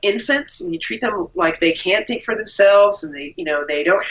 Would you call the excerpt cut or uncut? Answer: uncut